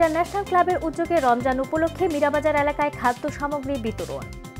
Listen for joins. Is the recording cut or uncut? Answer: uncut